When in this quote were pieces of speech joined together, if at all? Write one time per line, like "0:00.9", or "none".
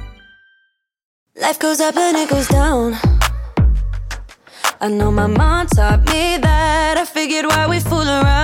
0:01.5

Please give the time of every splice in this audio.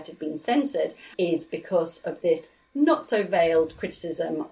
0:01.1

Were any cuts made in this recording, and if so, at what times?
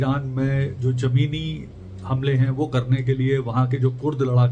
none

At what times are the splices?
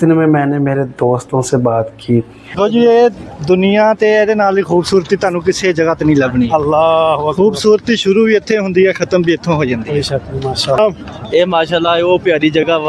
0:02.6
0:10.8

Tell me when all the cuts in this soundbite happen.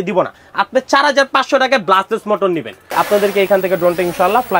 0:02.9

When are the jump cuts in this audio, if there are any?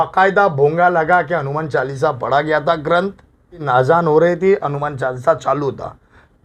0:03.6

